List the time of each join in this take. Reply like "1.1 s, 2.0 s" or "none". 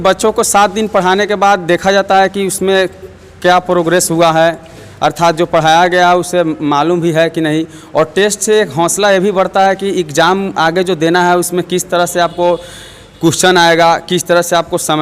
none

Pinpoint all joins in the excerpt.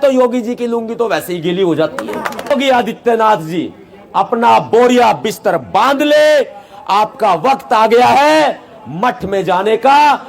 2.5 s

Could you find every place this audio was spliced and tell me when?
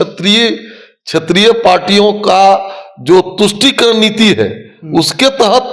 none

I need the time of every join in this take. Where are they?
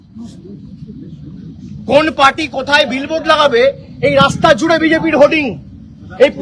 none

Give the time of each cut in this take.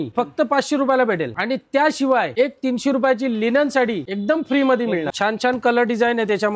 5.1 s

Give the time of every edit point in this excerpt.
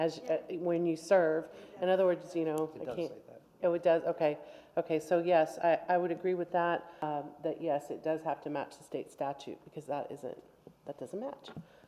7.0 s

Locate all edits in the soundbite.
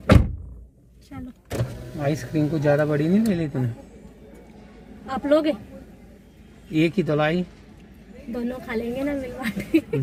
none

